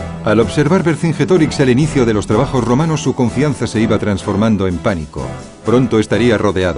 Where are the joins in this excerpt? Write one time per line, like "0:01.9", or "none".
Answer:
0:02.5